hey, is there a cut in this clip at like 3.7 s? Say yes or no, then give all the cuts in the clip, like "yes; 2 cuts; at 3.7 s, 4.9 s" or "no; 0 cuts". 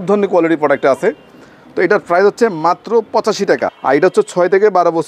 yes; 1 cut; at 3.7 s